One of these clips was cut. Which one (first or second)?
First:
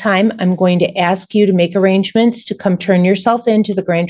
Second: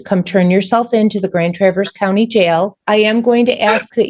second